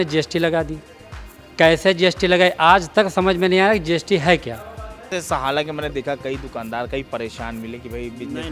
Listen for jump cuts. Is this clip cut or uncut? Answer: cut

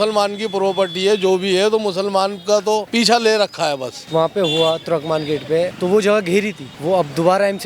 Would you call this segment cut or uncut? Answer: cut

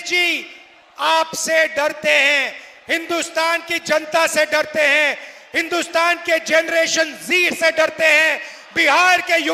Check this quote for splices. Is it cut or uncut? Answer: uncut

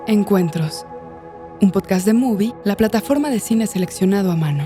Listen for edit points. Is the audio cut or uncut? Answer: uncut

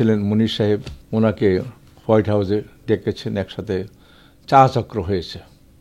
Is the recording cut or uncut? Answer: cut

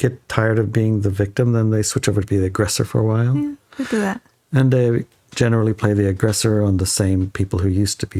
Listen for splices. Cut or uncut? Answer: uncut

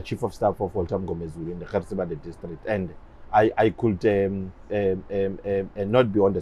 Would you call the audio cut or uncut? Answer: uncut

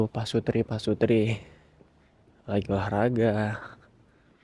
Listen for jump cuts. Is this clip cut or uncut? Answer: uncut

